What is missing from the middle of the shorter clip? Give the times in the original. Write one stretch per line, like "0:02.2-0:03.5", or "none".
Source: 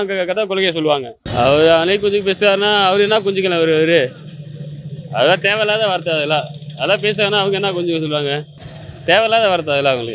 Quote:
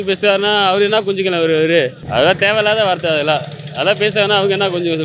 0:04.2-0:05.0